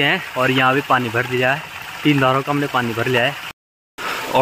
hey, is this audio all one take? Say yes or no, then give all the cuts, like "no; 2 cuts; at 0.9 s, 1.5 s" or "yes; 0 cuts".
no; 1 cut; at 3.4 s